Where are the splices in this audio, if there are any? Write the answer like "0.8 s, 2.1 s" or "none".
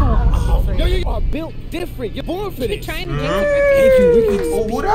1.0 s

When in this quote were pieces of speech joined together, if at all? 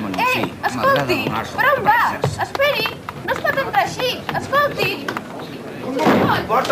2.7 s

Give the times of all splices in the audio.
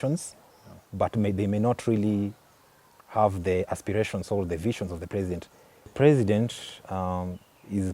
5.9 s

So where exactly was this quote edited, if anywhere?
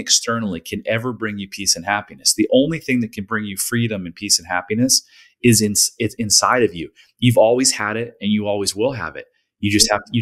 none

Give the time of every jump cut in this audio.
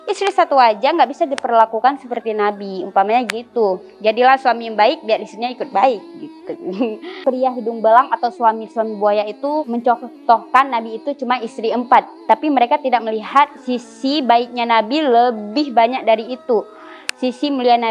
7.2 s

